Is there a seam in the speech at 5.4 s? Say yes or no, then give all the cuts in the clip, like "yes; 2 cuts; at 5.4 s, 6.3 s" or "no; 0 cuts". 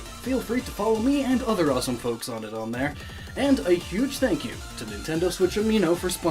no; 1 cut; at 3.4 s